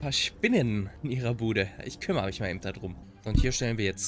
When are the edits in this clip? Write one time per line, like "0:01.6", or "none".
0:00.9
0:03.1